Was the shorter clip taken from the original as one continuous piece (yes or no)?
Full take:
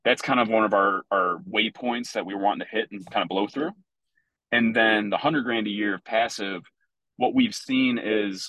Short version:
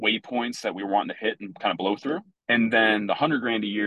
no